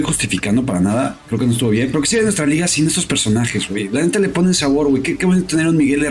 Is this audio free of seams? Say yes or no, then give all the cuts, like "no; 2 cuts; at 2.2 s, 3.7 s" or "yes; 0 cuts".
yes; 0 cuts